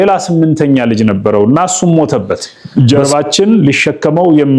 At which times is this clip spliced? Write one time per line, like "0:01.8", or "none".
0:02.6